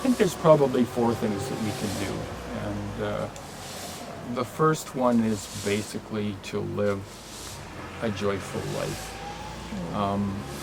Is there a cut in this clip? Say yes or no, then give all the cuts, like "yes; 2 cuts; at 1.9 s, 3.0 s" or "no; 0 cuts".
no; 0 cuts